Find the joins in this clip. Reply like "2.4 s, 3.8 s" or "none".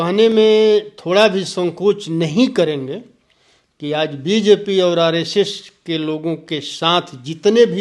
none